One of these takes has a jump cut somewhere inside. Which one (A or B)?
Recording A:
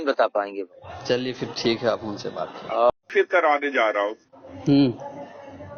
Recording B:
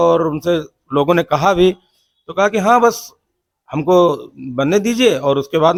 A